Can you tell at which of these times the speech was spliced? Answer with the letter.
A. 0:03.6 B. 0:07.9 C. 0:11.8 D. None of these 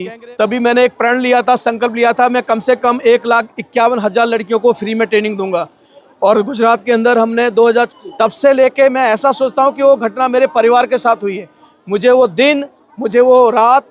B